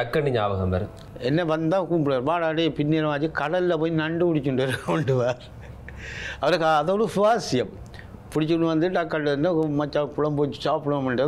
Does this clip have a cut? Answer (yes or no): yes